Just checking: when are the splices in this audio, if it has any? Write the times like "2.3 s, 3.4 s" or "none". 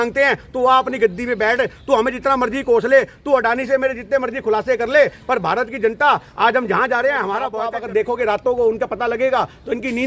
7.6 s